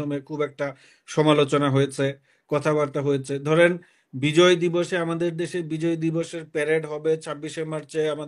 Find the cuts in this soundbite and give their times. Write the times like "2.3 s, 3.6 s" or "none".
none